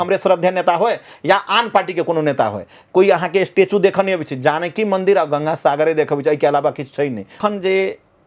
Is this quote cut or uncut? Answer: cut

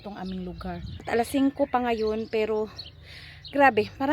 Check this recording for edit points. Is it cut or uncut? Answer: cut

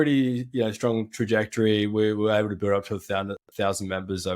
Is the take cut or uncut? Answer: uncut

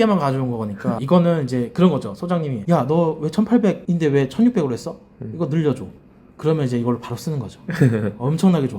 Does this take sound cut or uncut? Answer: cut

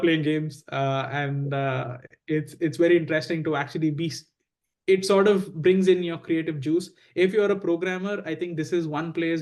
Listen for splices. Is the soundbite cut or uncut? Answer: uncut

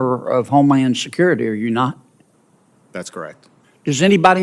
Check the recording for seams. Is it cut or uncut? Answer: uncut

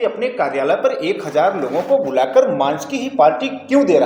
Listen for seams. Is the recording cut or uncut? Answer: uncut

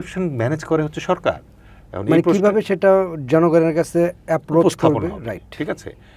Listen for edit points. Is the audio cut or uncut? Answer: uncut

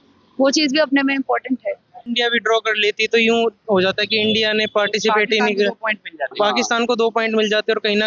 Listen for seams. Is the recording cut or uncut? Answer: cut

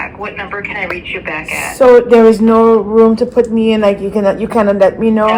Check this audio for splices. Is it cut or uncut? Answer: uncut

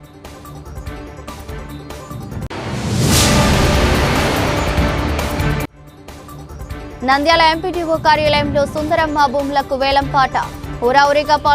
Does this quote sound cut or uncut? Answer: cut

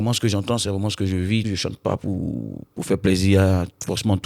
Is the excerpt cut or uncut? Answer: cut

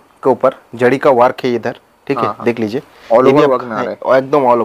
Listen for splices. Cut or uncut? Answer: uncut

